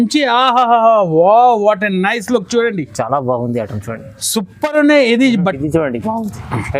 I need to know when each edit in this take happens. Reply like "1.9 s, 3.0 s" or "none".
5.6 s